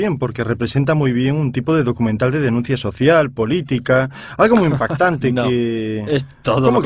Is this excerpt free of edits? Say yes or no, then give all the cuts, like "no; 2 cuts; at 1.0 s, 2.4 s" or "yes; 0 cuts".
yes; 0 cuts